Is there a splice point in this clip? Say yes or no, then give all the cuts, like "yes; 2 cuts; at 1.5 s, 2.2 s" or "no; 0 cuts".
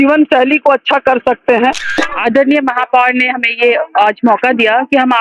yes; 1 cut; at 1.9 s